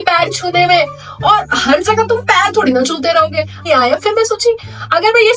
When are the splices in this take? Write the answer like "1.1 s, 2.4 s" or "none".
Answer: 3.6 s